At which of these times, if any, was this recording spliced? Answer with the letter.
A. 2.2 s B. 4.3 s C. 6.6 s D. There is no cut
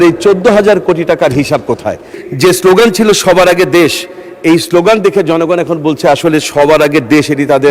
A